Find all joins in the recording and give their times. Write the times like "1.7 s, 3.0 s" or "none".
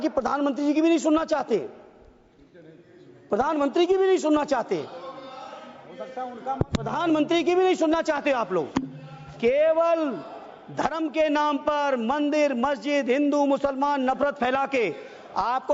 none